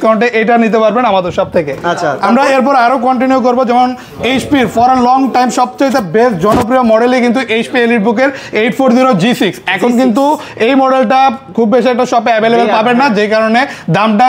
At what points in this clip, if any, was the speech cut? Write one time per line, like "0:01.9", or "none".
none